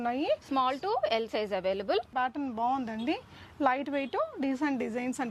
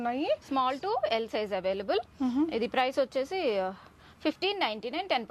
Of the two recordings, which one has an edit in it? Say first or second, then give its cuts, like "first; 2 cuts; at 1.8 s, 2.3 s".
first; 1 cut; at 2.1 s